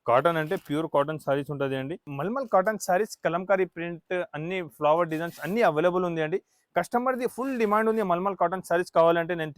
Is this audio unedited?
no; 1 cut; at 2.1 s

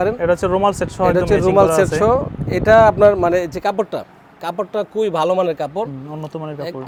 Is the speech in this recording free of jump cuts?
yes; 0 cuts

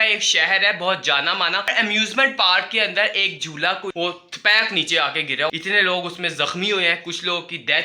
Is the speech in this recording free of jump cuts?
no; 3 cuts; at 1.7 s, 3.9 s, 5.5 s

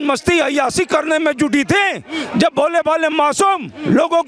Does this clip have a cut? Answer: no; 0 cuts

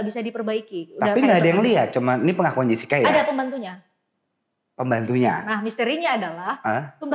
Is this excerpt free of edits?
yes; 0 cuts

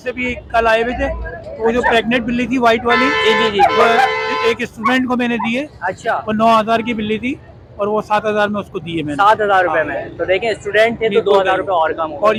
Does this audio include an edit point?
no; 0 cuts

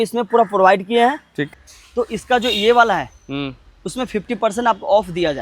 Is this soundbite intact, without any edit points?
no; 1 cut; at 1.5 s

